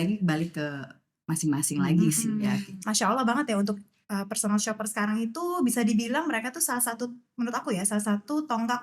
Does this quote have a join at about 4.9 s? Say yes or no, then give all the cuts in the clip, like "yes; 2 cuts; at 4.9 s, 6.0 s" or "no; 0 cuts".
no; 1 cut; at 2.8 s